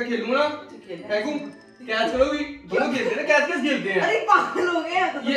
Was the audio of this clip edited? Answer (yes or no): no